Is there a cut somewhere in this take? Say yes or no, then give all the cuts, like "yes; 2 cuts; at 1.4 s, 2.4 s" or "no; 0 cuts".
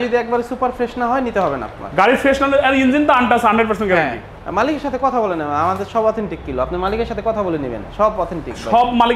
no; 0 cuts